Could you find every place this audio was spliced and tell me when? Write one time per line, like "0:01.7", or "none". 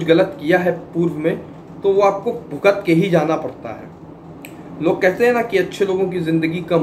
none